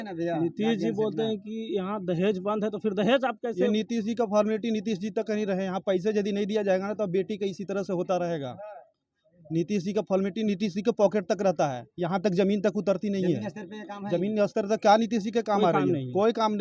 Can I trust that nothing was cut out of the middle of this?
yes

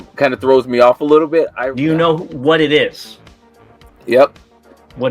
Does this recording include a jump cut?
yes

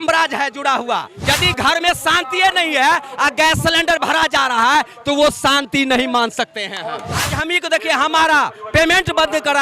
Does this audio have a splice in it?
yes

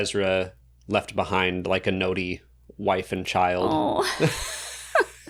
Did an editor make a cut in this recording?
no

